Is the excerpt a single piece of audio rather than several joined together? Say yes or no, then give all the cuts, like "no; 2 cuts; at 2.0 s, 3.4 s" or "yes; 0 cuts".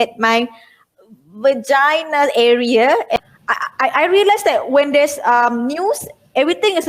no; 1 cut; at 3.2 s